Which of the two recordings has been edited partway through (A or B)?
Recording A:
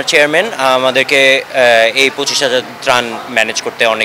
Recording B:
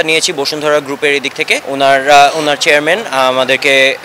B